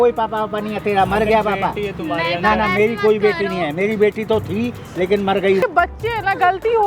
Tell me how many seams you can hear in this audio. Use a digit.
1